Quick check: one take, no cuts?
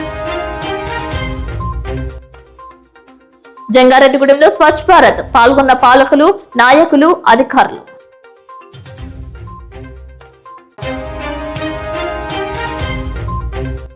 yes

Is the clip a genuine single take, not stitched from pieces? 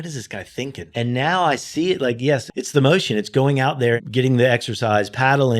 no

